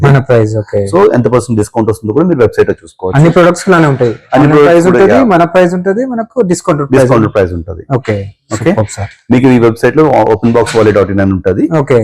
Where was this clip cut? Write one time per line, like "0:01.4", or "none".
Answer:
none